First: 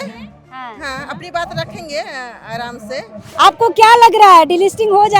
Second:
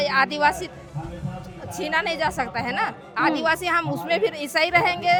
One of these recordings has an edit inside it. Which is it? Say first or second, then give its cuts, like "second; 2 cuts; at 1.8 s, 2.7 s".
first; 1 cut; at 3.2 s